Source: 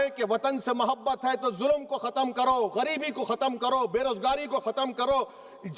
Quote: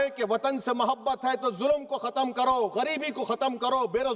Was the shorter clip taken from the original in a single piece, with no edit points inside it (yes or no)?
yes